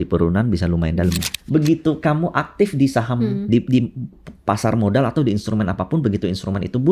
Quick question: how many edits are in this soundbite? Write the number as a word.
one